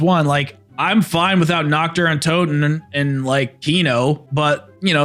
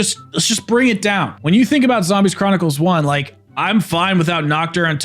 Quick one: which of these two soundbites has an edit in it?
second; 1 cut; at 1.3 s

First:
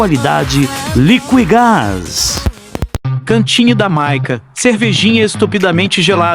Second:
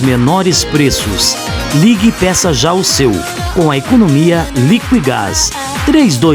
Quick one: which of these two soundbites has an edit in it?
first; 1 cut; at 3.0 s

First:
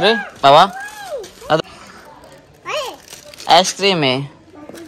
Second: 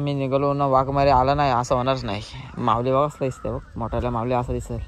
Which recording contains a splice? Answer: first; 1 cut; at 1.6 s

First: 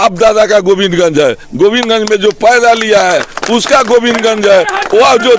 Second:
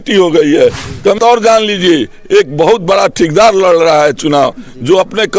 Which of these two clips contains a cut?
second; 1 cut; at 1.2 s

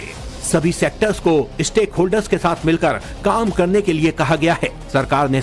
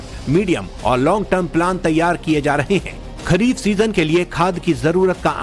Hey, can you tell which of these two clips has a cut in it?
first; 1 cut; at 4.0 s

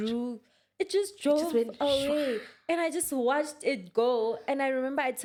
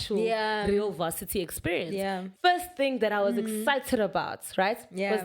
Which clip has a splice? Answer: second; 1 cut; at 2.2 s

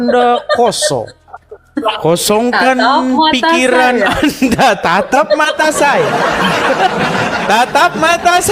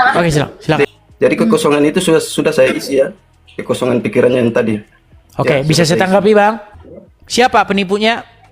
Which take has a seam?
second; 2 cuts; at 1.0 s, 6.7 s

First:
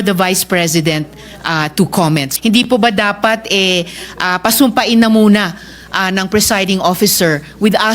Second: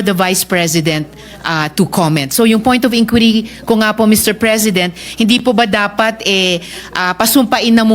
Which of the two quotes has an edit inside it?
first; 1 cut; at 2.3 s

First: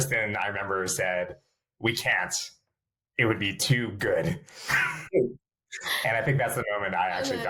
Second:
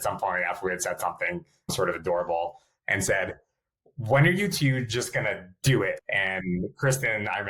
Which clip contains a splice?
second; 2 cuts; at 1.7 s, 6.0 s

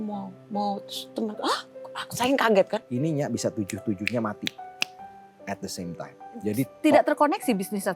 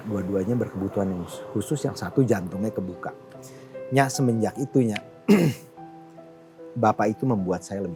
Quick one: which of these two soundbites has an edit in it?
first; 1 cut; at 2.8 s

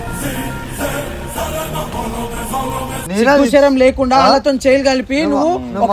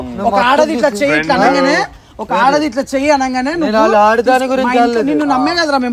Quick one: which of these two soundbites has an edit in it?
first; 1 cut; at 2.9 s

